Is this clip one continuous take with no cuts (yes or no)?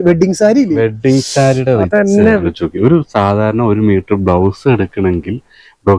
no